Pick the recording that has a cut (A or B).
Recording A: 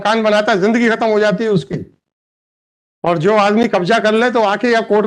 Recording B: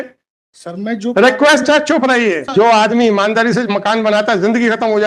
B